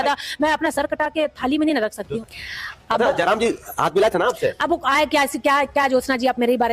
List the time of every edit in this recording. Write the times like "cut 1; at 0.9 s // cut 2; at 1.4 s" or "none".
cut 1; at 2.1 s

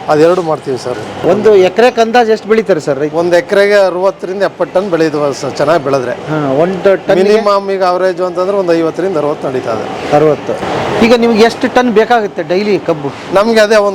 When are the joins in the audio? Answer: cut 1; at 1.2 s // cut 2; at 10.6 s

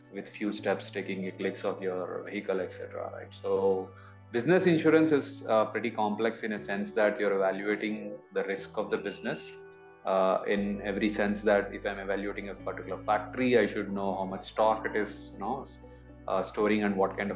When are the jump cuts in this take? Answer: none

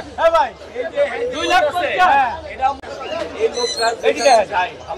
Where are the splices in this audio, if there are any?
none

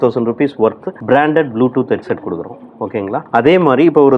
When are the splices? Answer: none

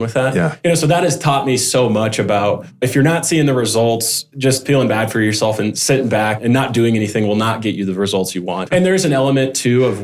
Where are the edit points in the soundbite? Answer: cut 1; at 2.7 s // cut 2; at 4.6 s // cut 3; at 8.7 s

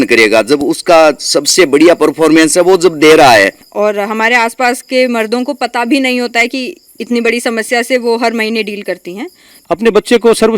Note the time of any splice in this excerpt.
cut 1; at 3.6 s // cut 2; at 9.5 s

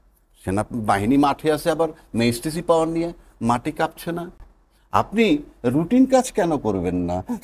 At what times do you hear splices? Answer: none

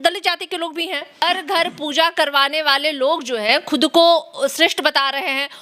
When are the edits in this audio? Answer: cut 1; at 1.2 s

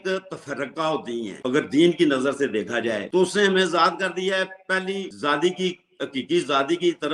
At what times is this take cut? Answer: none

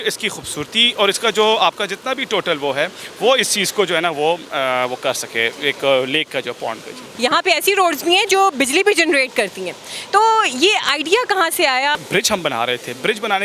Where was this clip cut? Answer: cut 1; at 7.0 s // cut 2; at 12.0 s

